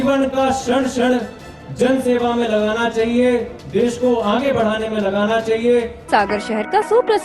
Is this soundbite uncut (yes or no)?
no